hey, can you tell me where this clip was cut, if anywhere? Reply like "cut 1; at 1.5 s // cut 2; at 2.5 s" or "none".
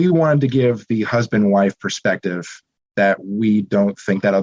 none